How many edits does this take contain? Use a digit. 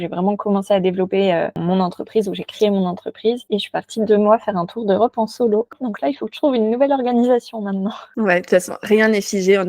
1